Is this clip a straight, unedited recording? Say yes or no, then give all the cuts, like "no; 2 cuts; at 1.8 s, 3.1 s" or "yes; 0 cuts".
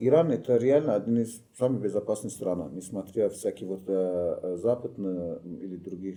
yes; 0 cuts